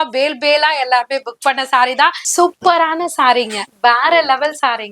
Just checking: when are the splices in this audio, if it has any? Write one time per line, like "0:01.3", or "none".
0:02.2

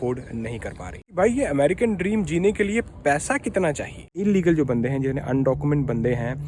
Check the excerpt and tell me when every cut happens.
0:01.1
0:04.2

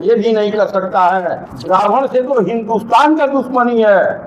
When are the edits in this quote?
0:01.5

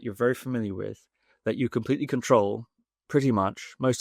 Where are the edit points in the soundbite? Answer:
none

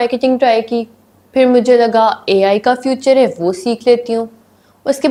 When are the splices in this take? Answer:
none

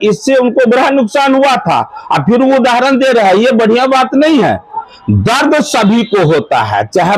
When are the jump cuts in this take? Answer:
0:04.9

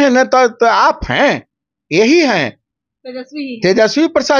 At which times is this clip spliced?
none

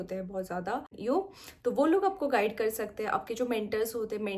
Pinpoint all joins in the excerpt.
0:00.9

